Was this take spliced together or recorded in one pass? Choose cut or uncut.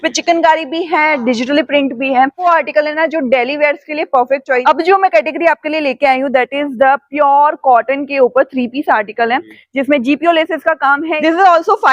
cut